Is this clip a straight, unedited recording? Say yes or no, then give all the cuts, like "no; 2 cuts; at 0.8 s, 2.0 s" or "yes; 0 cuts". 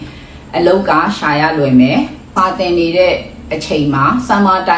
no; 1 cut; at 2.3 s